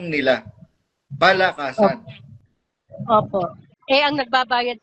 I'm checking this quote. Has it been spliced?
yes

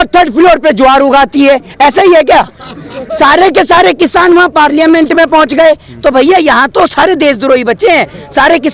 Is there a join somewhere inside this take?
no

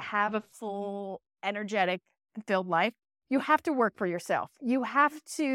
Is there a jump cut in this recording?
no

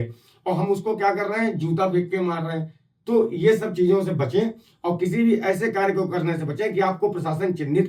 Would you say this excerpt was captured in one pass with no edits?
yes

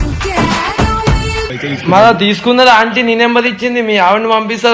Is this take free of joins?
no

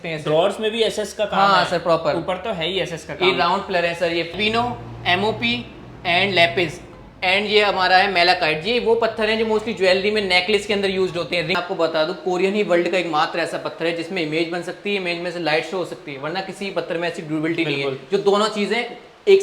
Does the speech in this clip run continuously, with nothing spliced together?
no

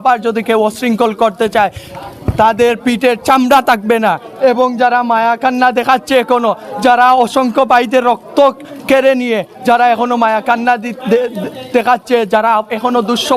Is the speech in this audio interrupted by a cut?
no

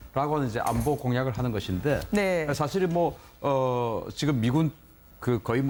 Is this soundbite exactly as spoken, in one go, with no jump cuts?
yes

